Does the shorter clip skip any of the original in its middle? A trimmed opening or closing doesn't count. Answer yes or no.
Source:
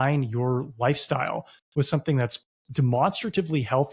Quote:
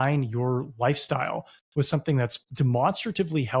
yes